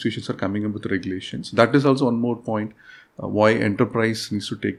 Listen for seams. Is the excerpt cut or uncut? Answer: uncut